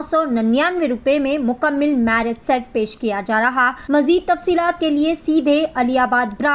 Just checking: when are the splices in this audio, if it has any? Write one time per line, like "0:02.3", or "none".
0:03.8